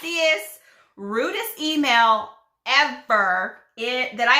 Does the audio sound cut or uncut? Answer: uncut